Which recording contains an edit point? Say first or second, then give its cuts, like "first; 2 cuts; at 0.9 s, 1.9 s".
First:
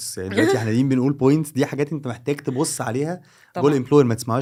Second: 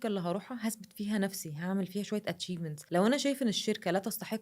second; 1 cut; at 2.7 s